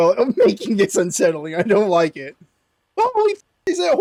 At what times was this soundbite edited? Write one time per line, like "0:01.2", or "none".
none

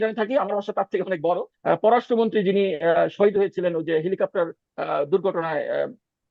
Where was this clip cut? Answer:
0:01.5

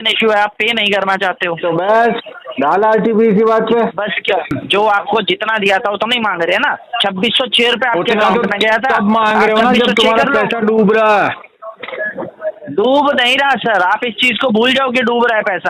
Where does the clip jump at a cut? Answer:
0:04.6

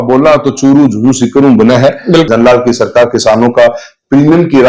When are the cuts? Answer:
0:02.3

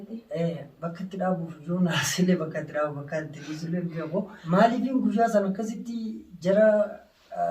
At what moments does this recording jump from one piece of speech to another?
0:04.4

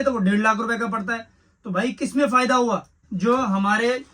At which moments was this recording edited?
0:03.1

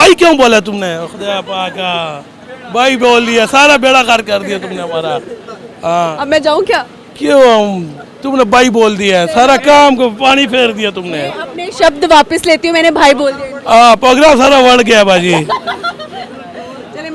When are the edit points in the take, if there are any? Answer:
none

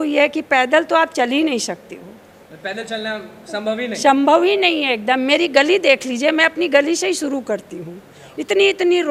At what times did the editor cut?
none

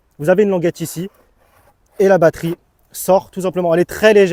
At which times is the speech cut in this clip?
none

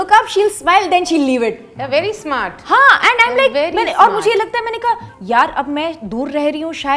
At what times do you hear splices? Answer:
none

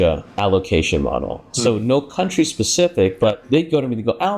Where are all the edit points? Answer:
0:03.4

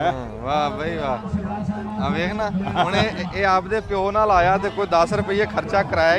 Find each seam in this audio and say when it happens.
none

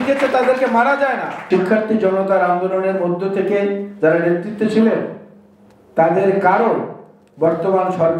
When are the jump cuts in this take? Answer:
0:01.3

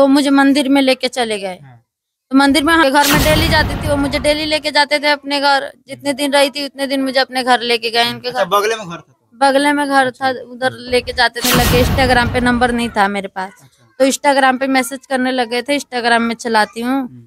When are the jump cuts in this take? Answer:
0:02.8
0:11.5

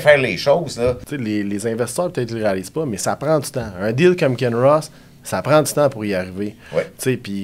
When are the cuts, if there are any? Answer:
0:01.1

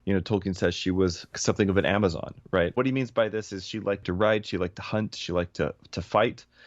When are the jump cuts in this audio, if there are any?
0:01.4
0:02.7
0:04.0

